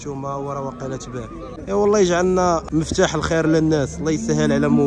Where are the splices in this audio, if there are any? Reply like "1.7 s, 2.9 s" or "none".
1.5 s, 2.7 s

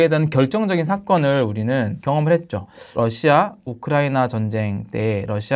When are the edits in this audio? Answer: 2.0 s, 2.7 s

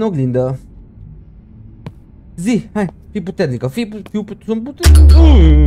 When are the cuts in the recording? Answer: none

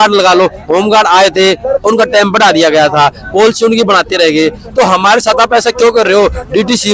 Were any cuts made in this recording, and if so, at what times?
none

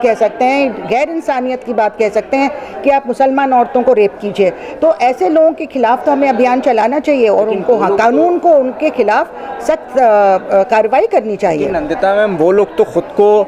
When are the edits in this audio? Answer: none

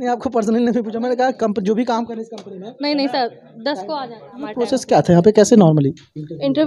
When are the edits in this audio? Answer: 4.7 s

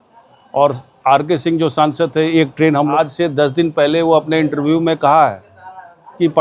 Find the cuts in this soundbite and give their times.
2.9 s

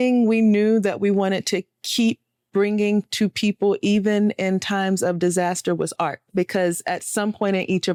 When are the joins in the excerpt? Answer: none

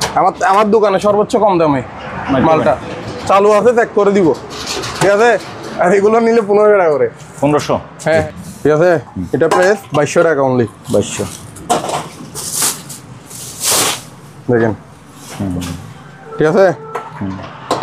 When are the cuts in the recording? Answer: 5.6 s, 8.2 s

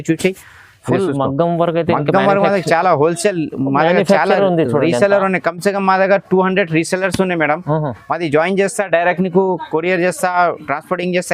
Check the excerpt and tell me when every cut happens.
none

